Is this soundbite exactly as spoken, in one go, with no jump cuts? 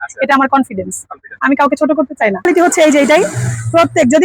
no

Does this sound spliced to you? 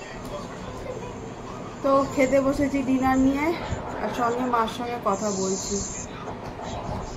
no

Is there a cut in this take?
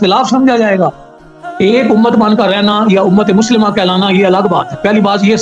yes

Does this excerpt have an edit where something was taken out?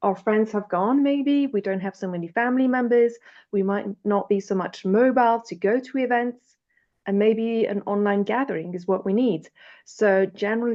no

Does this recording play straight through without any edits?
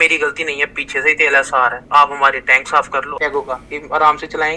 no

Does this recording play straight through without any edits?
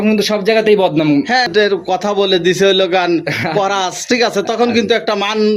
no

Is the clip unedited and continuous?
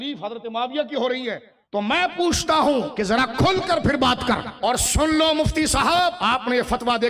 no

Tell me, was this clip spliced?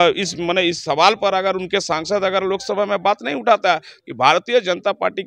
yes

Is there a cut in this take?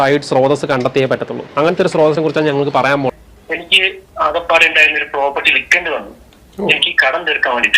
yes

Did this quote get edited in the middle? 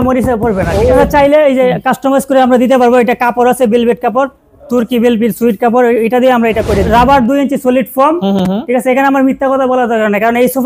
yes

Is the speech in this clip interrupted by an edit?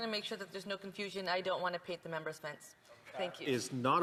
no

